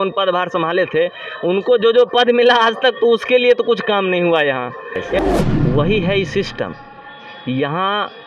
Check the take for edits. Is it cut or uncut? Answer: cut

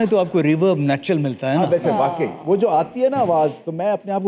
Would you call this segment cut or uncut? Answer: uncut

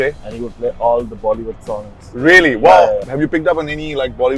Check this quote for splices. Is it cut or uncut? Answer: cut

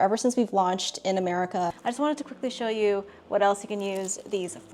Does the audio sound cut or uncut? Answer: cut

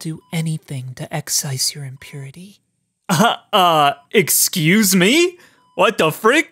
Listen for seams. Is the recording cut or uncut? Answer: uncut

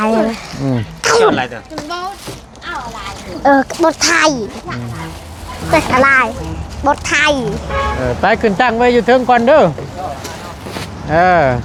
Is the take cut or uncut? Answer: uncut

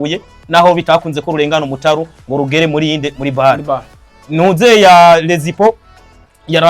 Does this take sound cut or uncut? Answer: uncut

